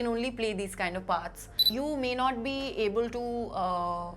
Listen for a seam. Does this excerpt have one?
yes; 1 cut; at 1.7 s

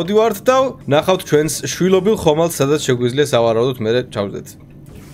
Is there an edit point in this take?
no; 0 cuts

